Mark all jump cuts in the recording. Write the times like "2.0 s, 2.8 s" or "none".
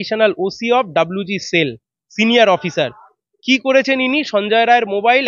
none